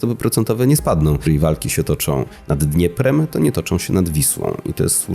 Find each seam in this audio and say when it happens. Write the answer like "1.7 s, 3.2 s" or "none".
1.2 s